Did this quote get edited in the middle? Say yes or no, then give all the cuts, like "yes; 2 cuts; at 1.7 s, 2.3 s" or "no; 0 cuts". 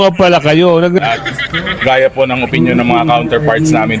yes; 1 cut; at 1.0 s